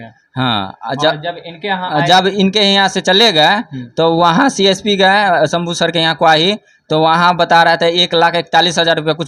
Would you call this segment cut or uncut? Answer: uncut